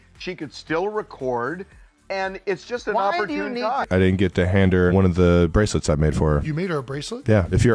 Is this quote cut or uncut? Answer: cut